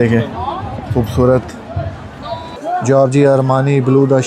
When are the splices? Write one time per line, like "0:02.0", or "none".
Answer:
0:02.5

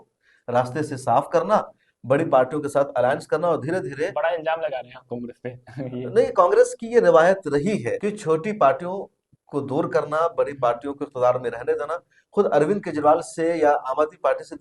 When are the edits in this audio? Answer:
none

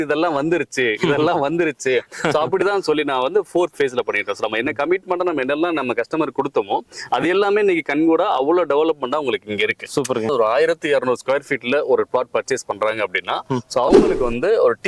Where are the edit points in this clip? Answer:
0:10.3

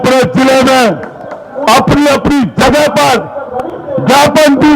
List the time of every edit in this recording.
none

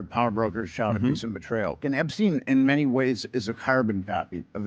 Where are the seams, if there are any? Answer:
0:01.8

